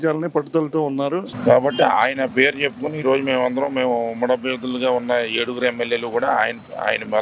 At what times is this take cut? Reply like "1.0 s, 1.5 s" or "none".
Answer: 1.3 s